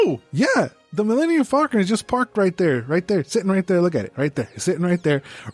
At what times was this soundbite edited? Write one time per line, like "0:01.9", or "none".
none